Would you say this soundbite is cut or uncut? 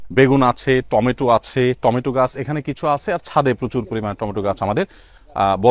uncut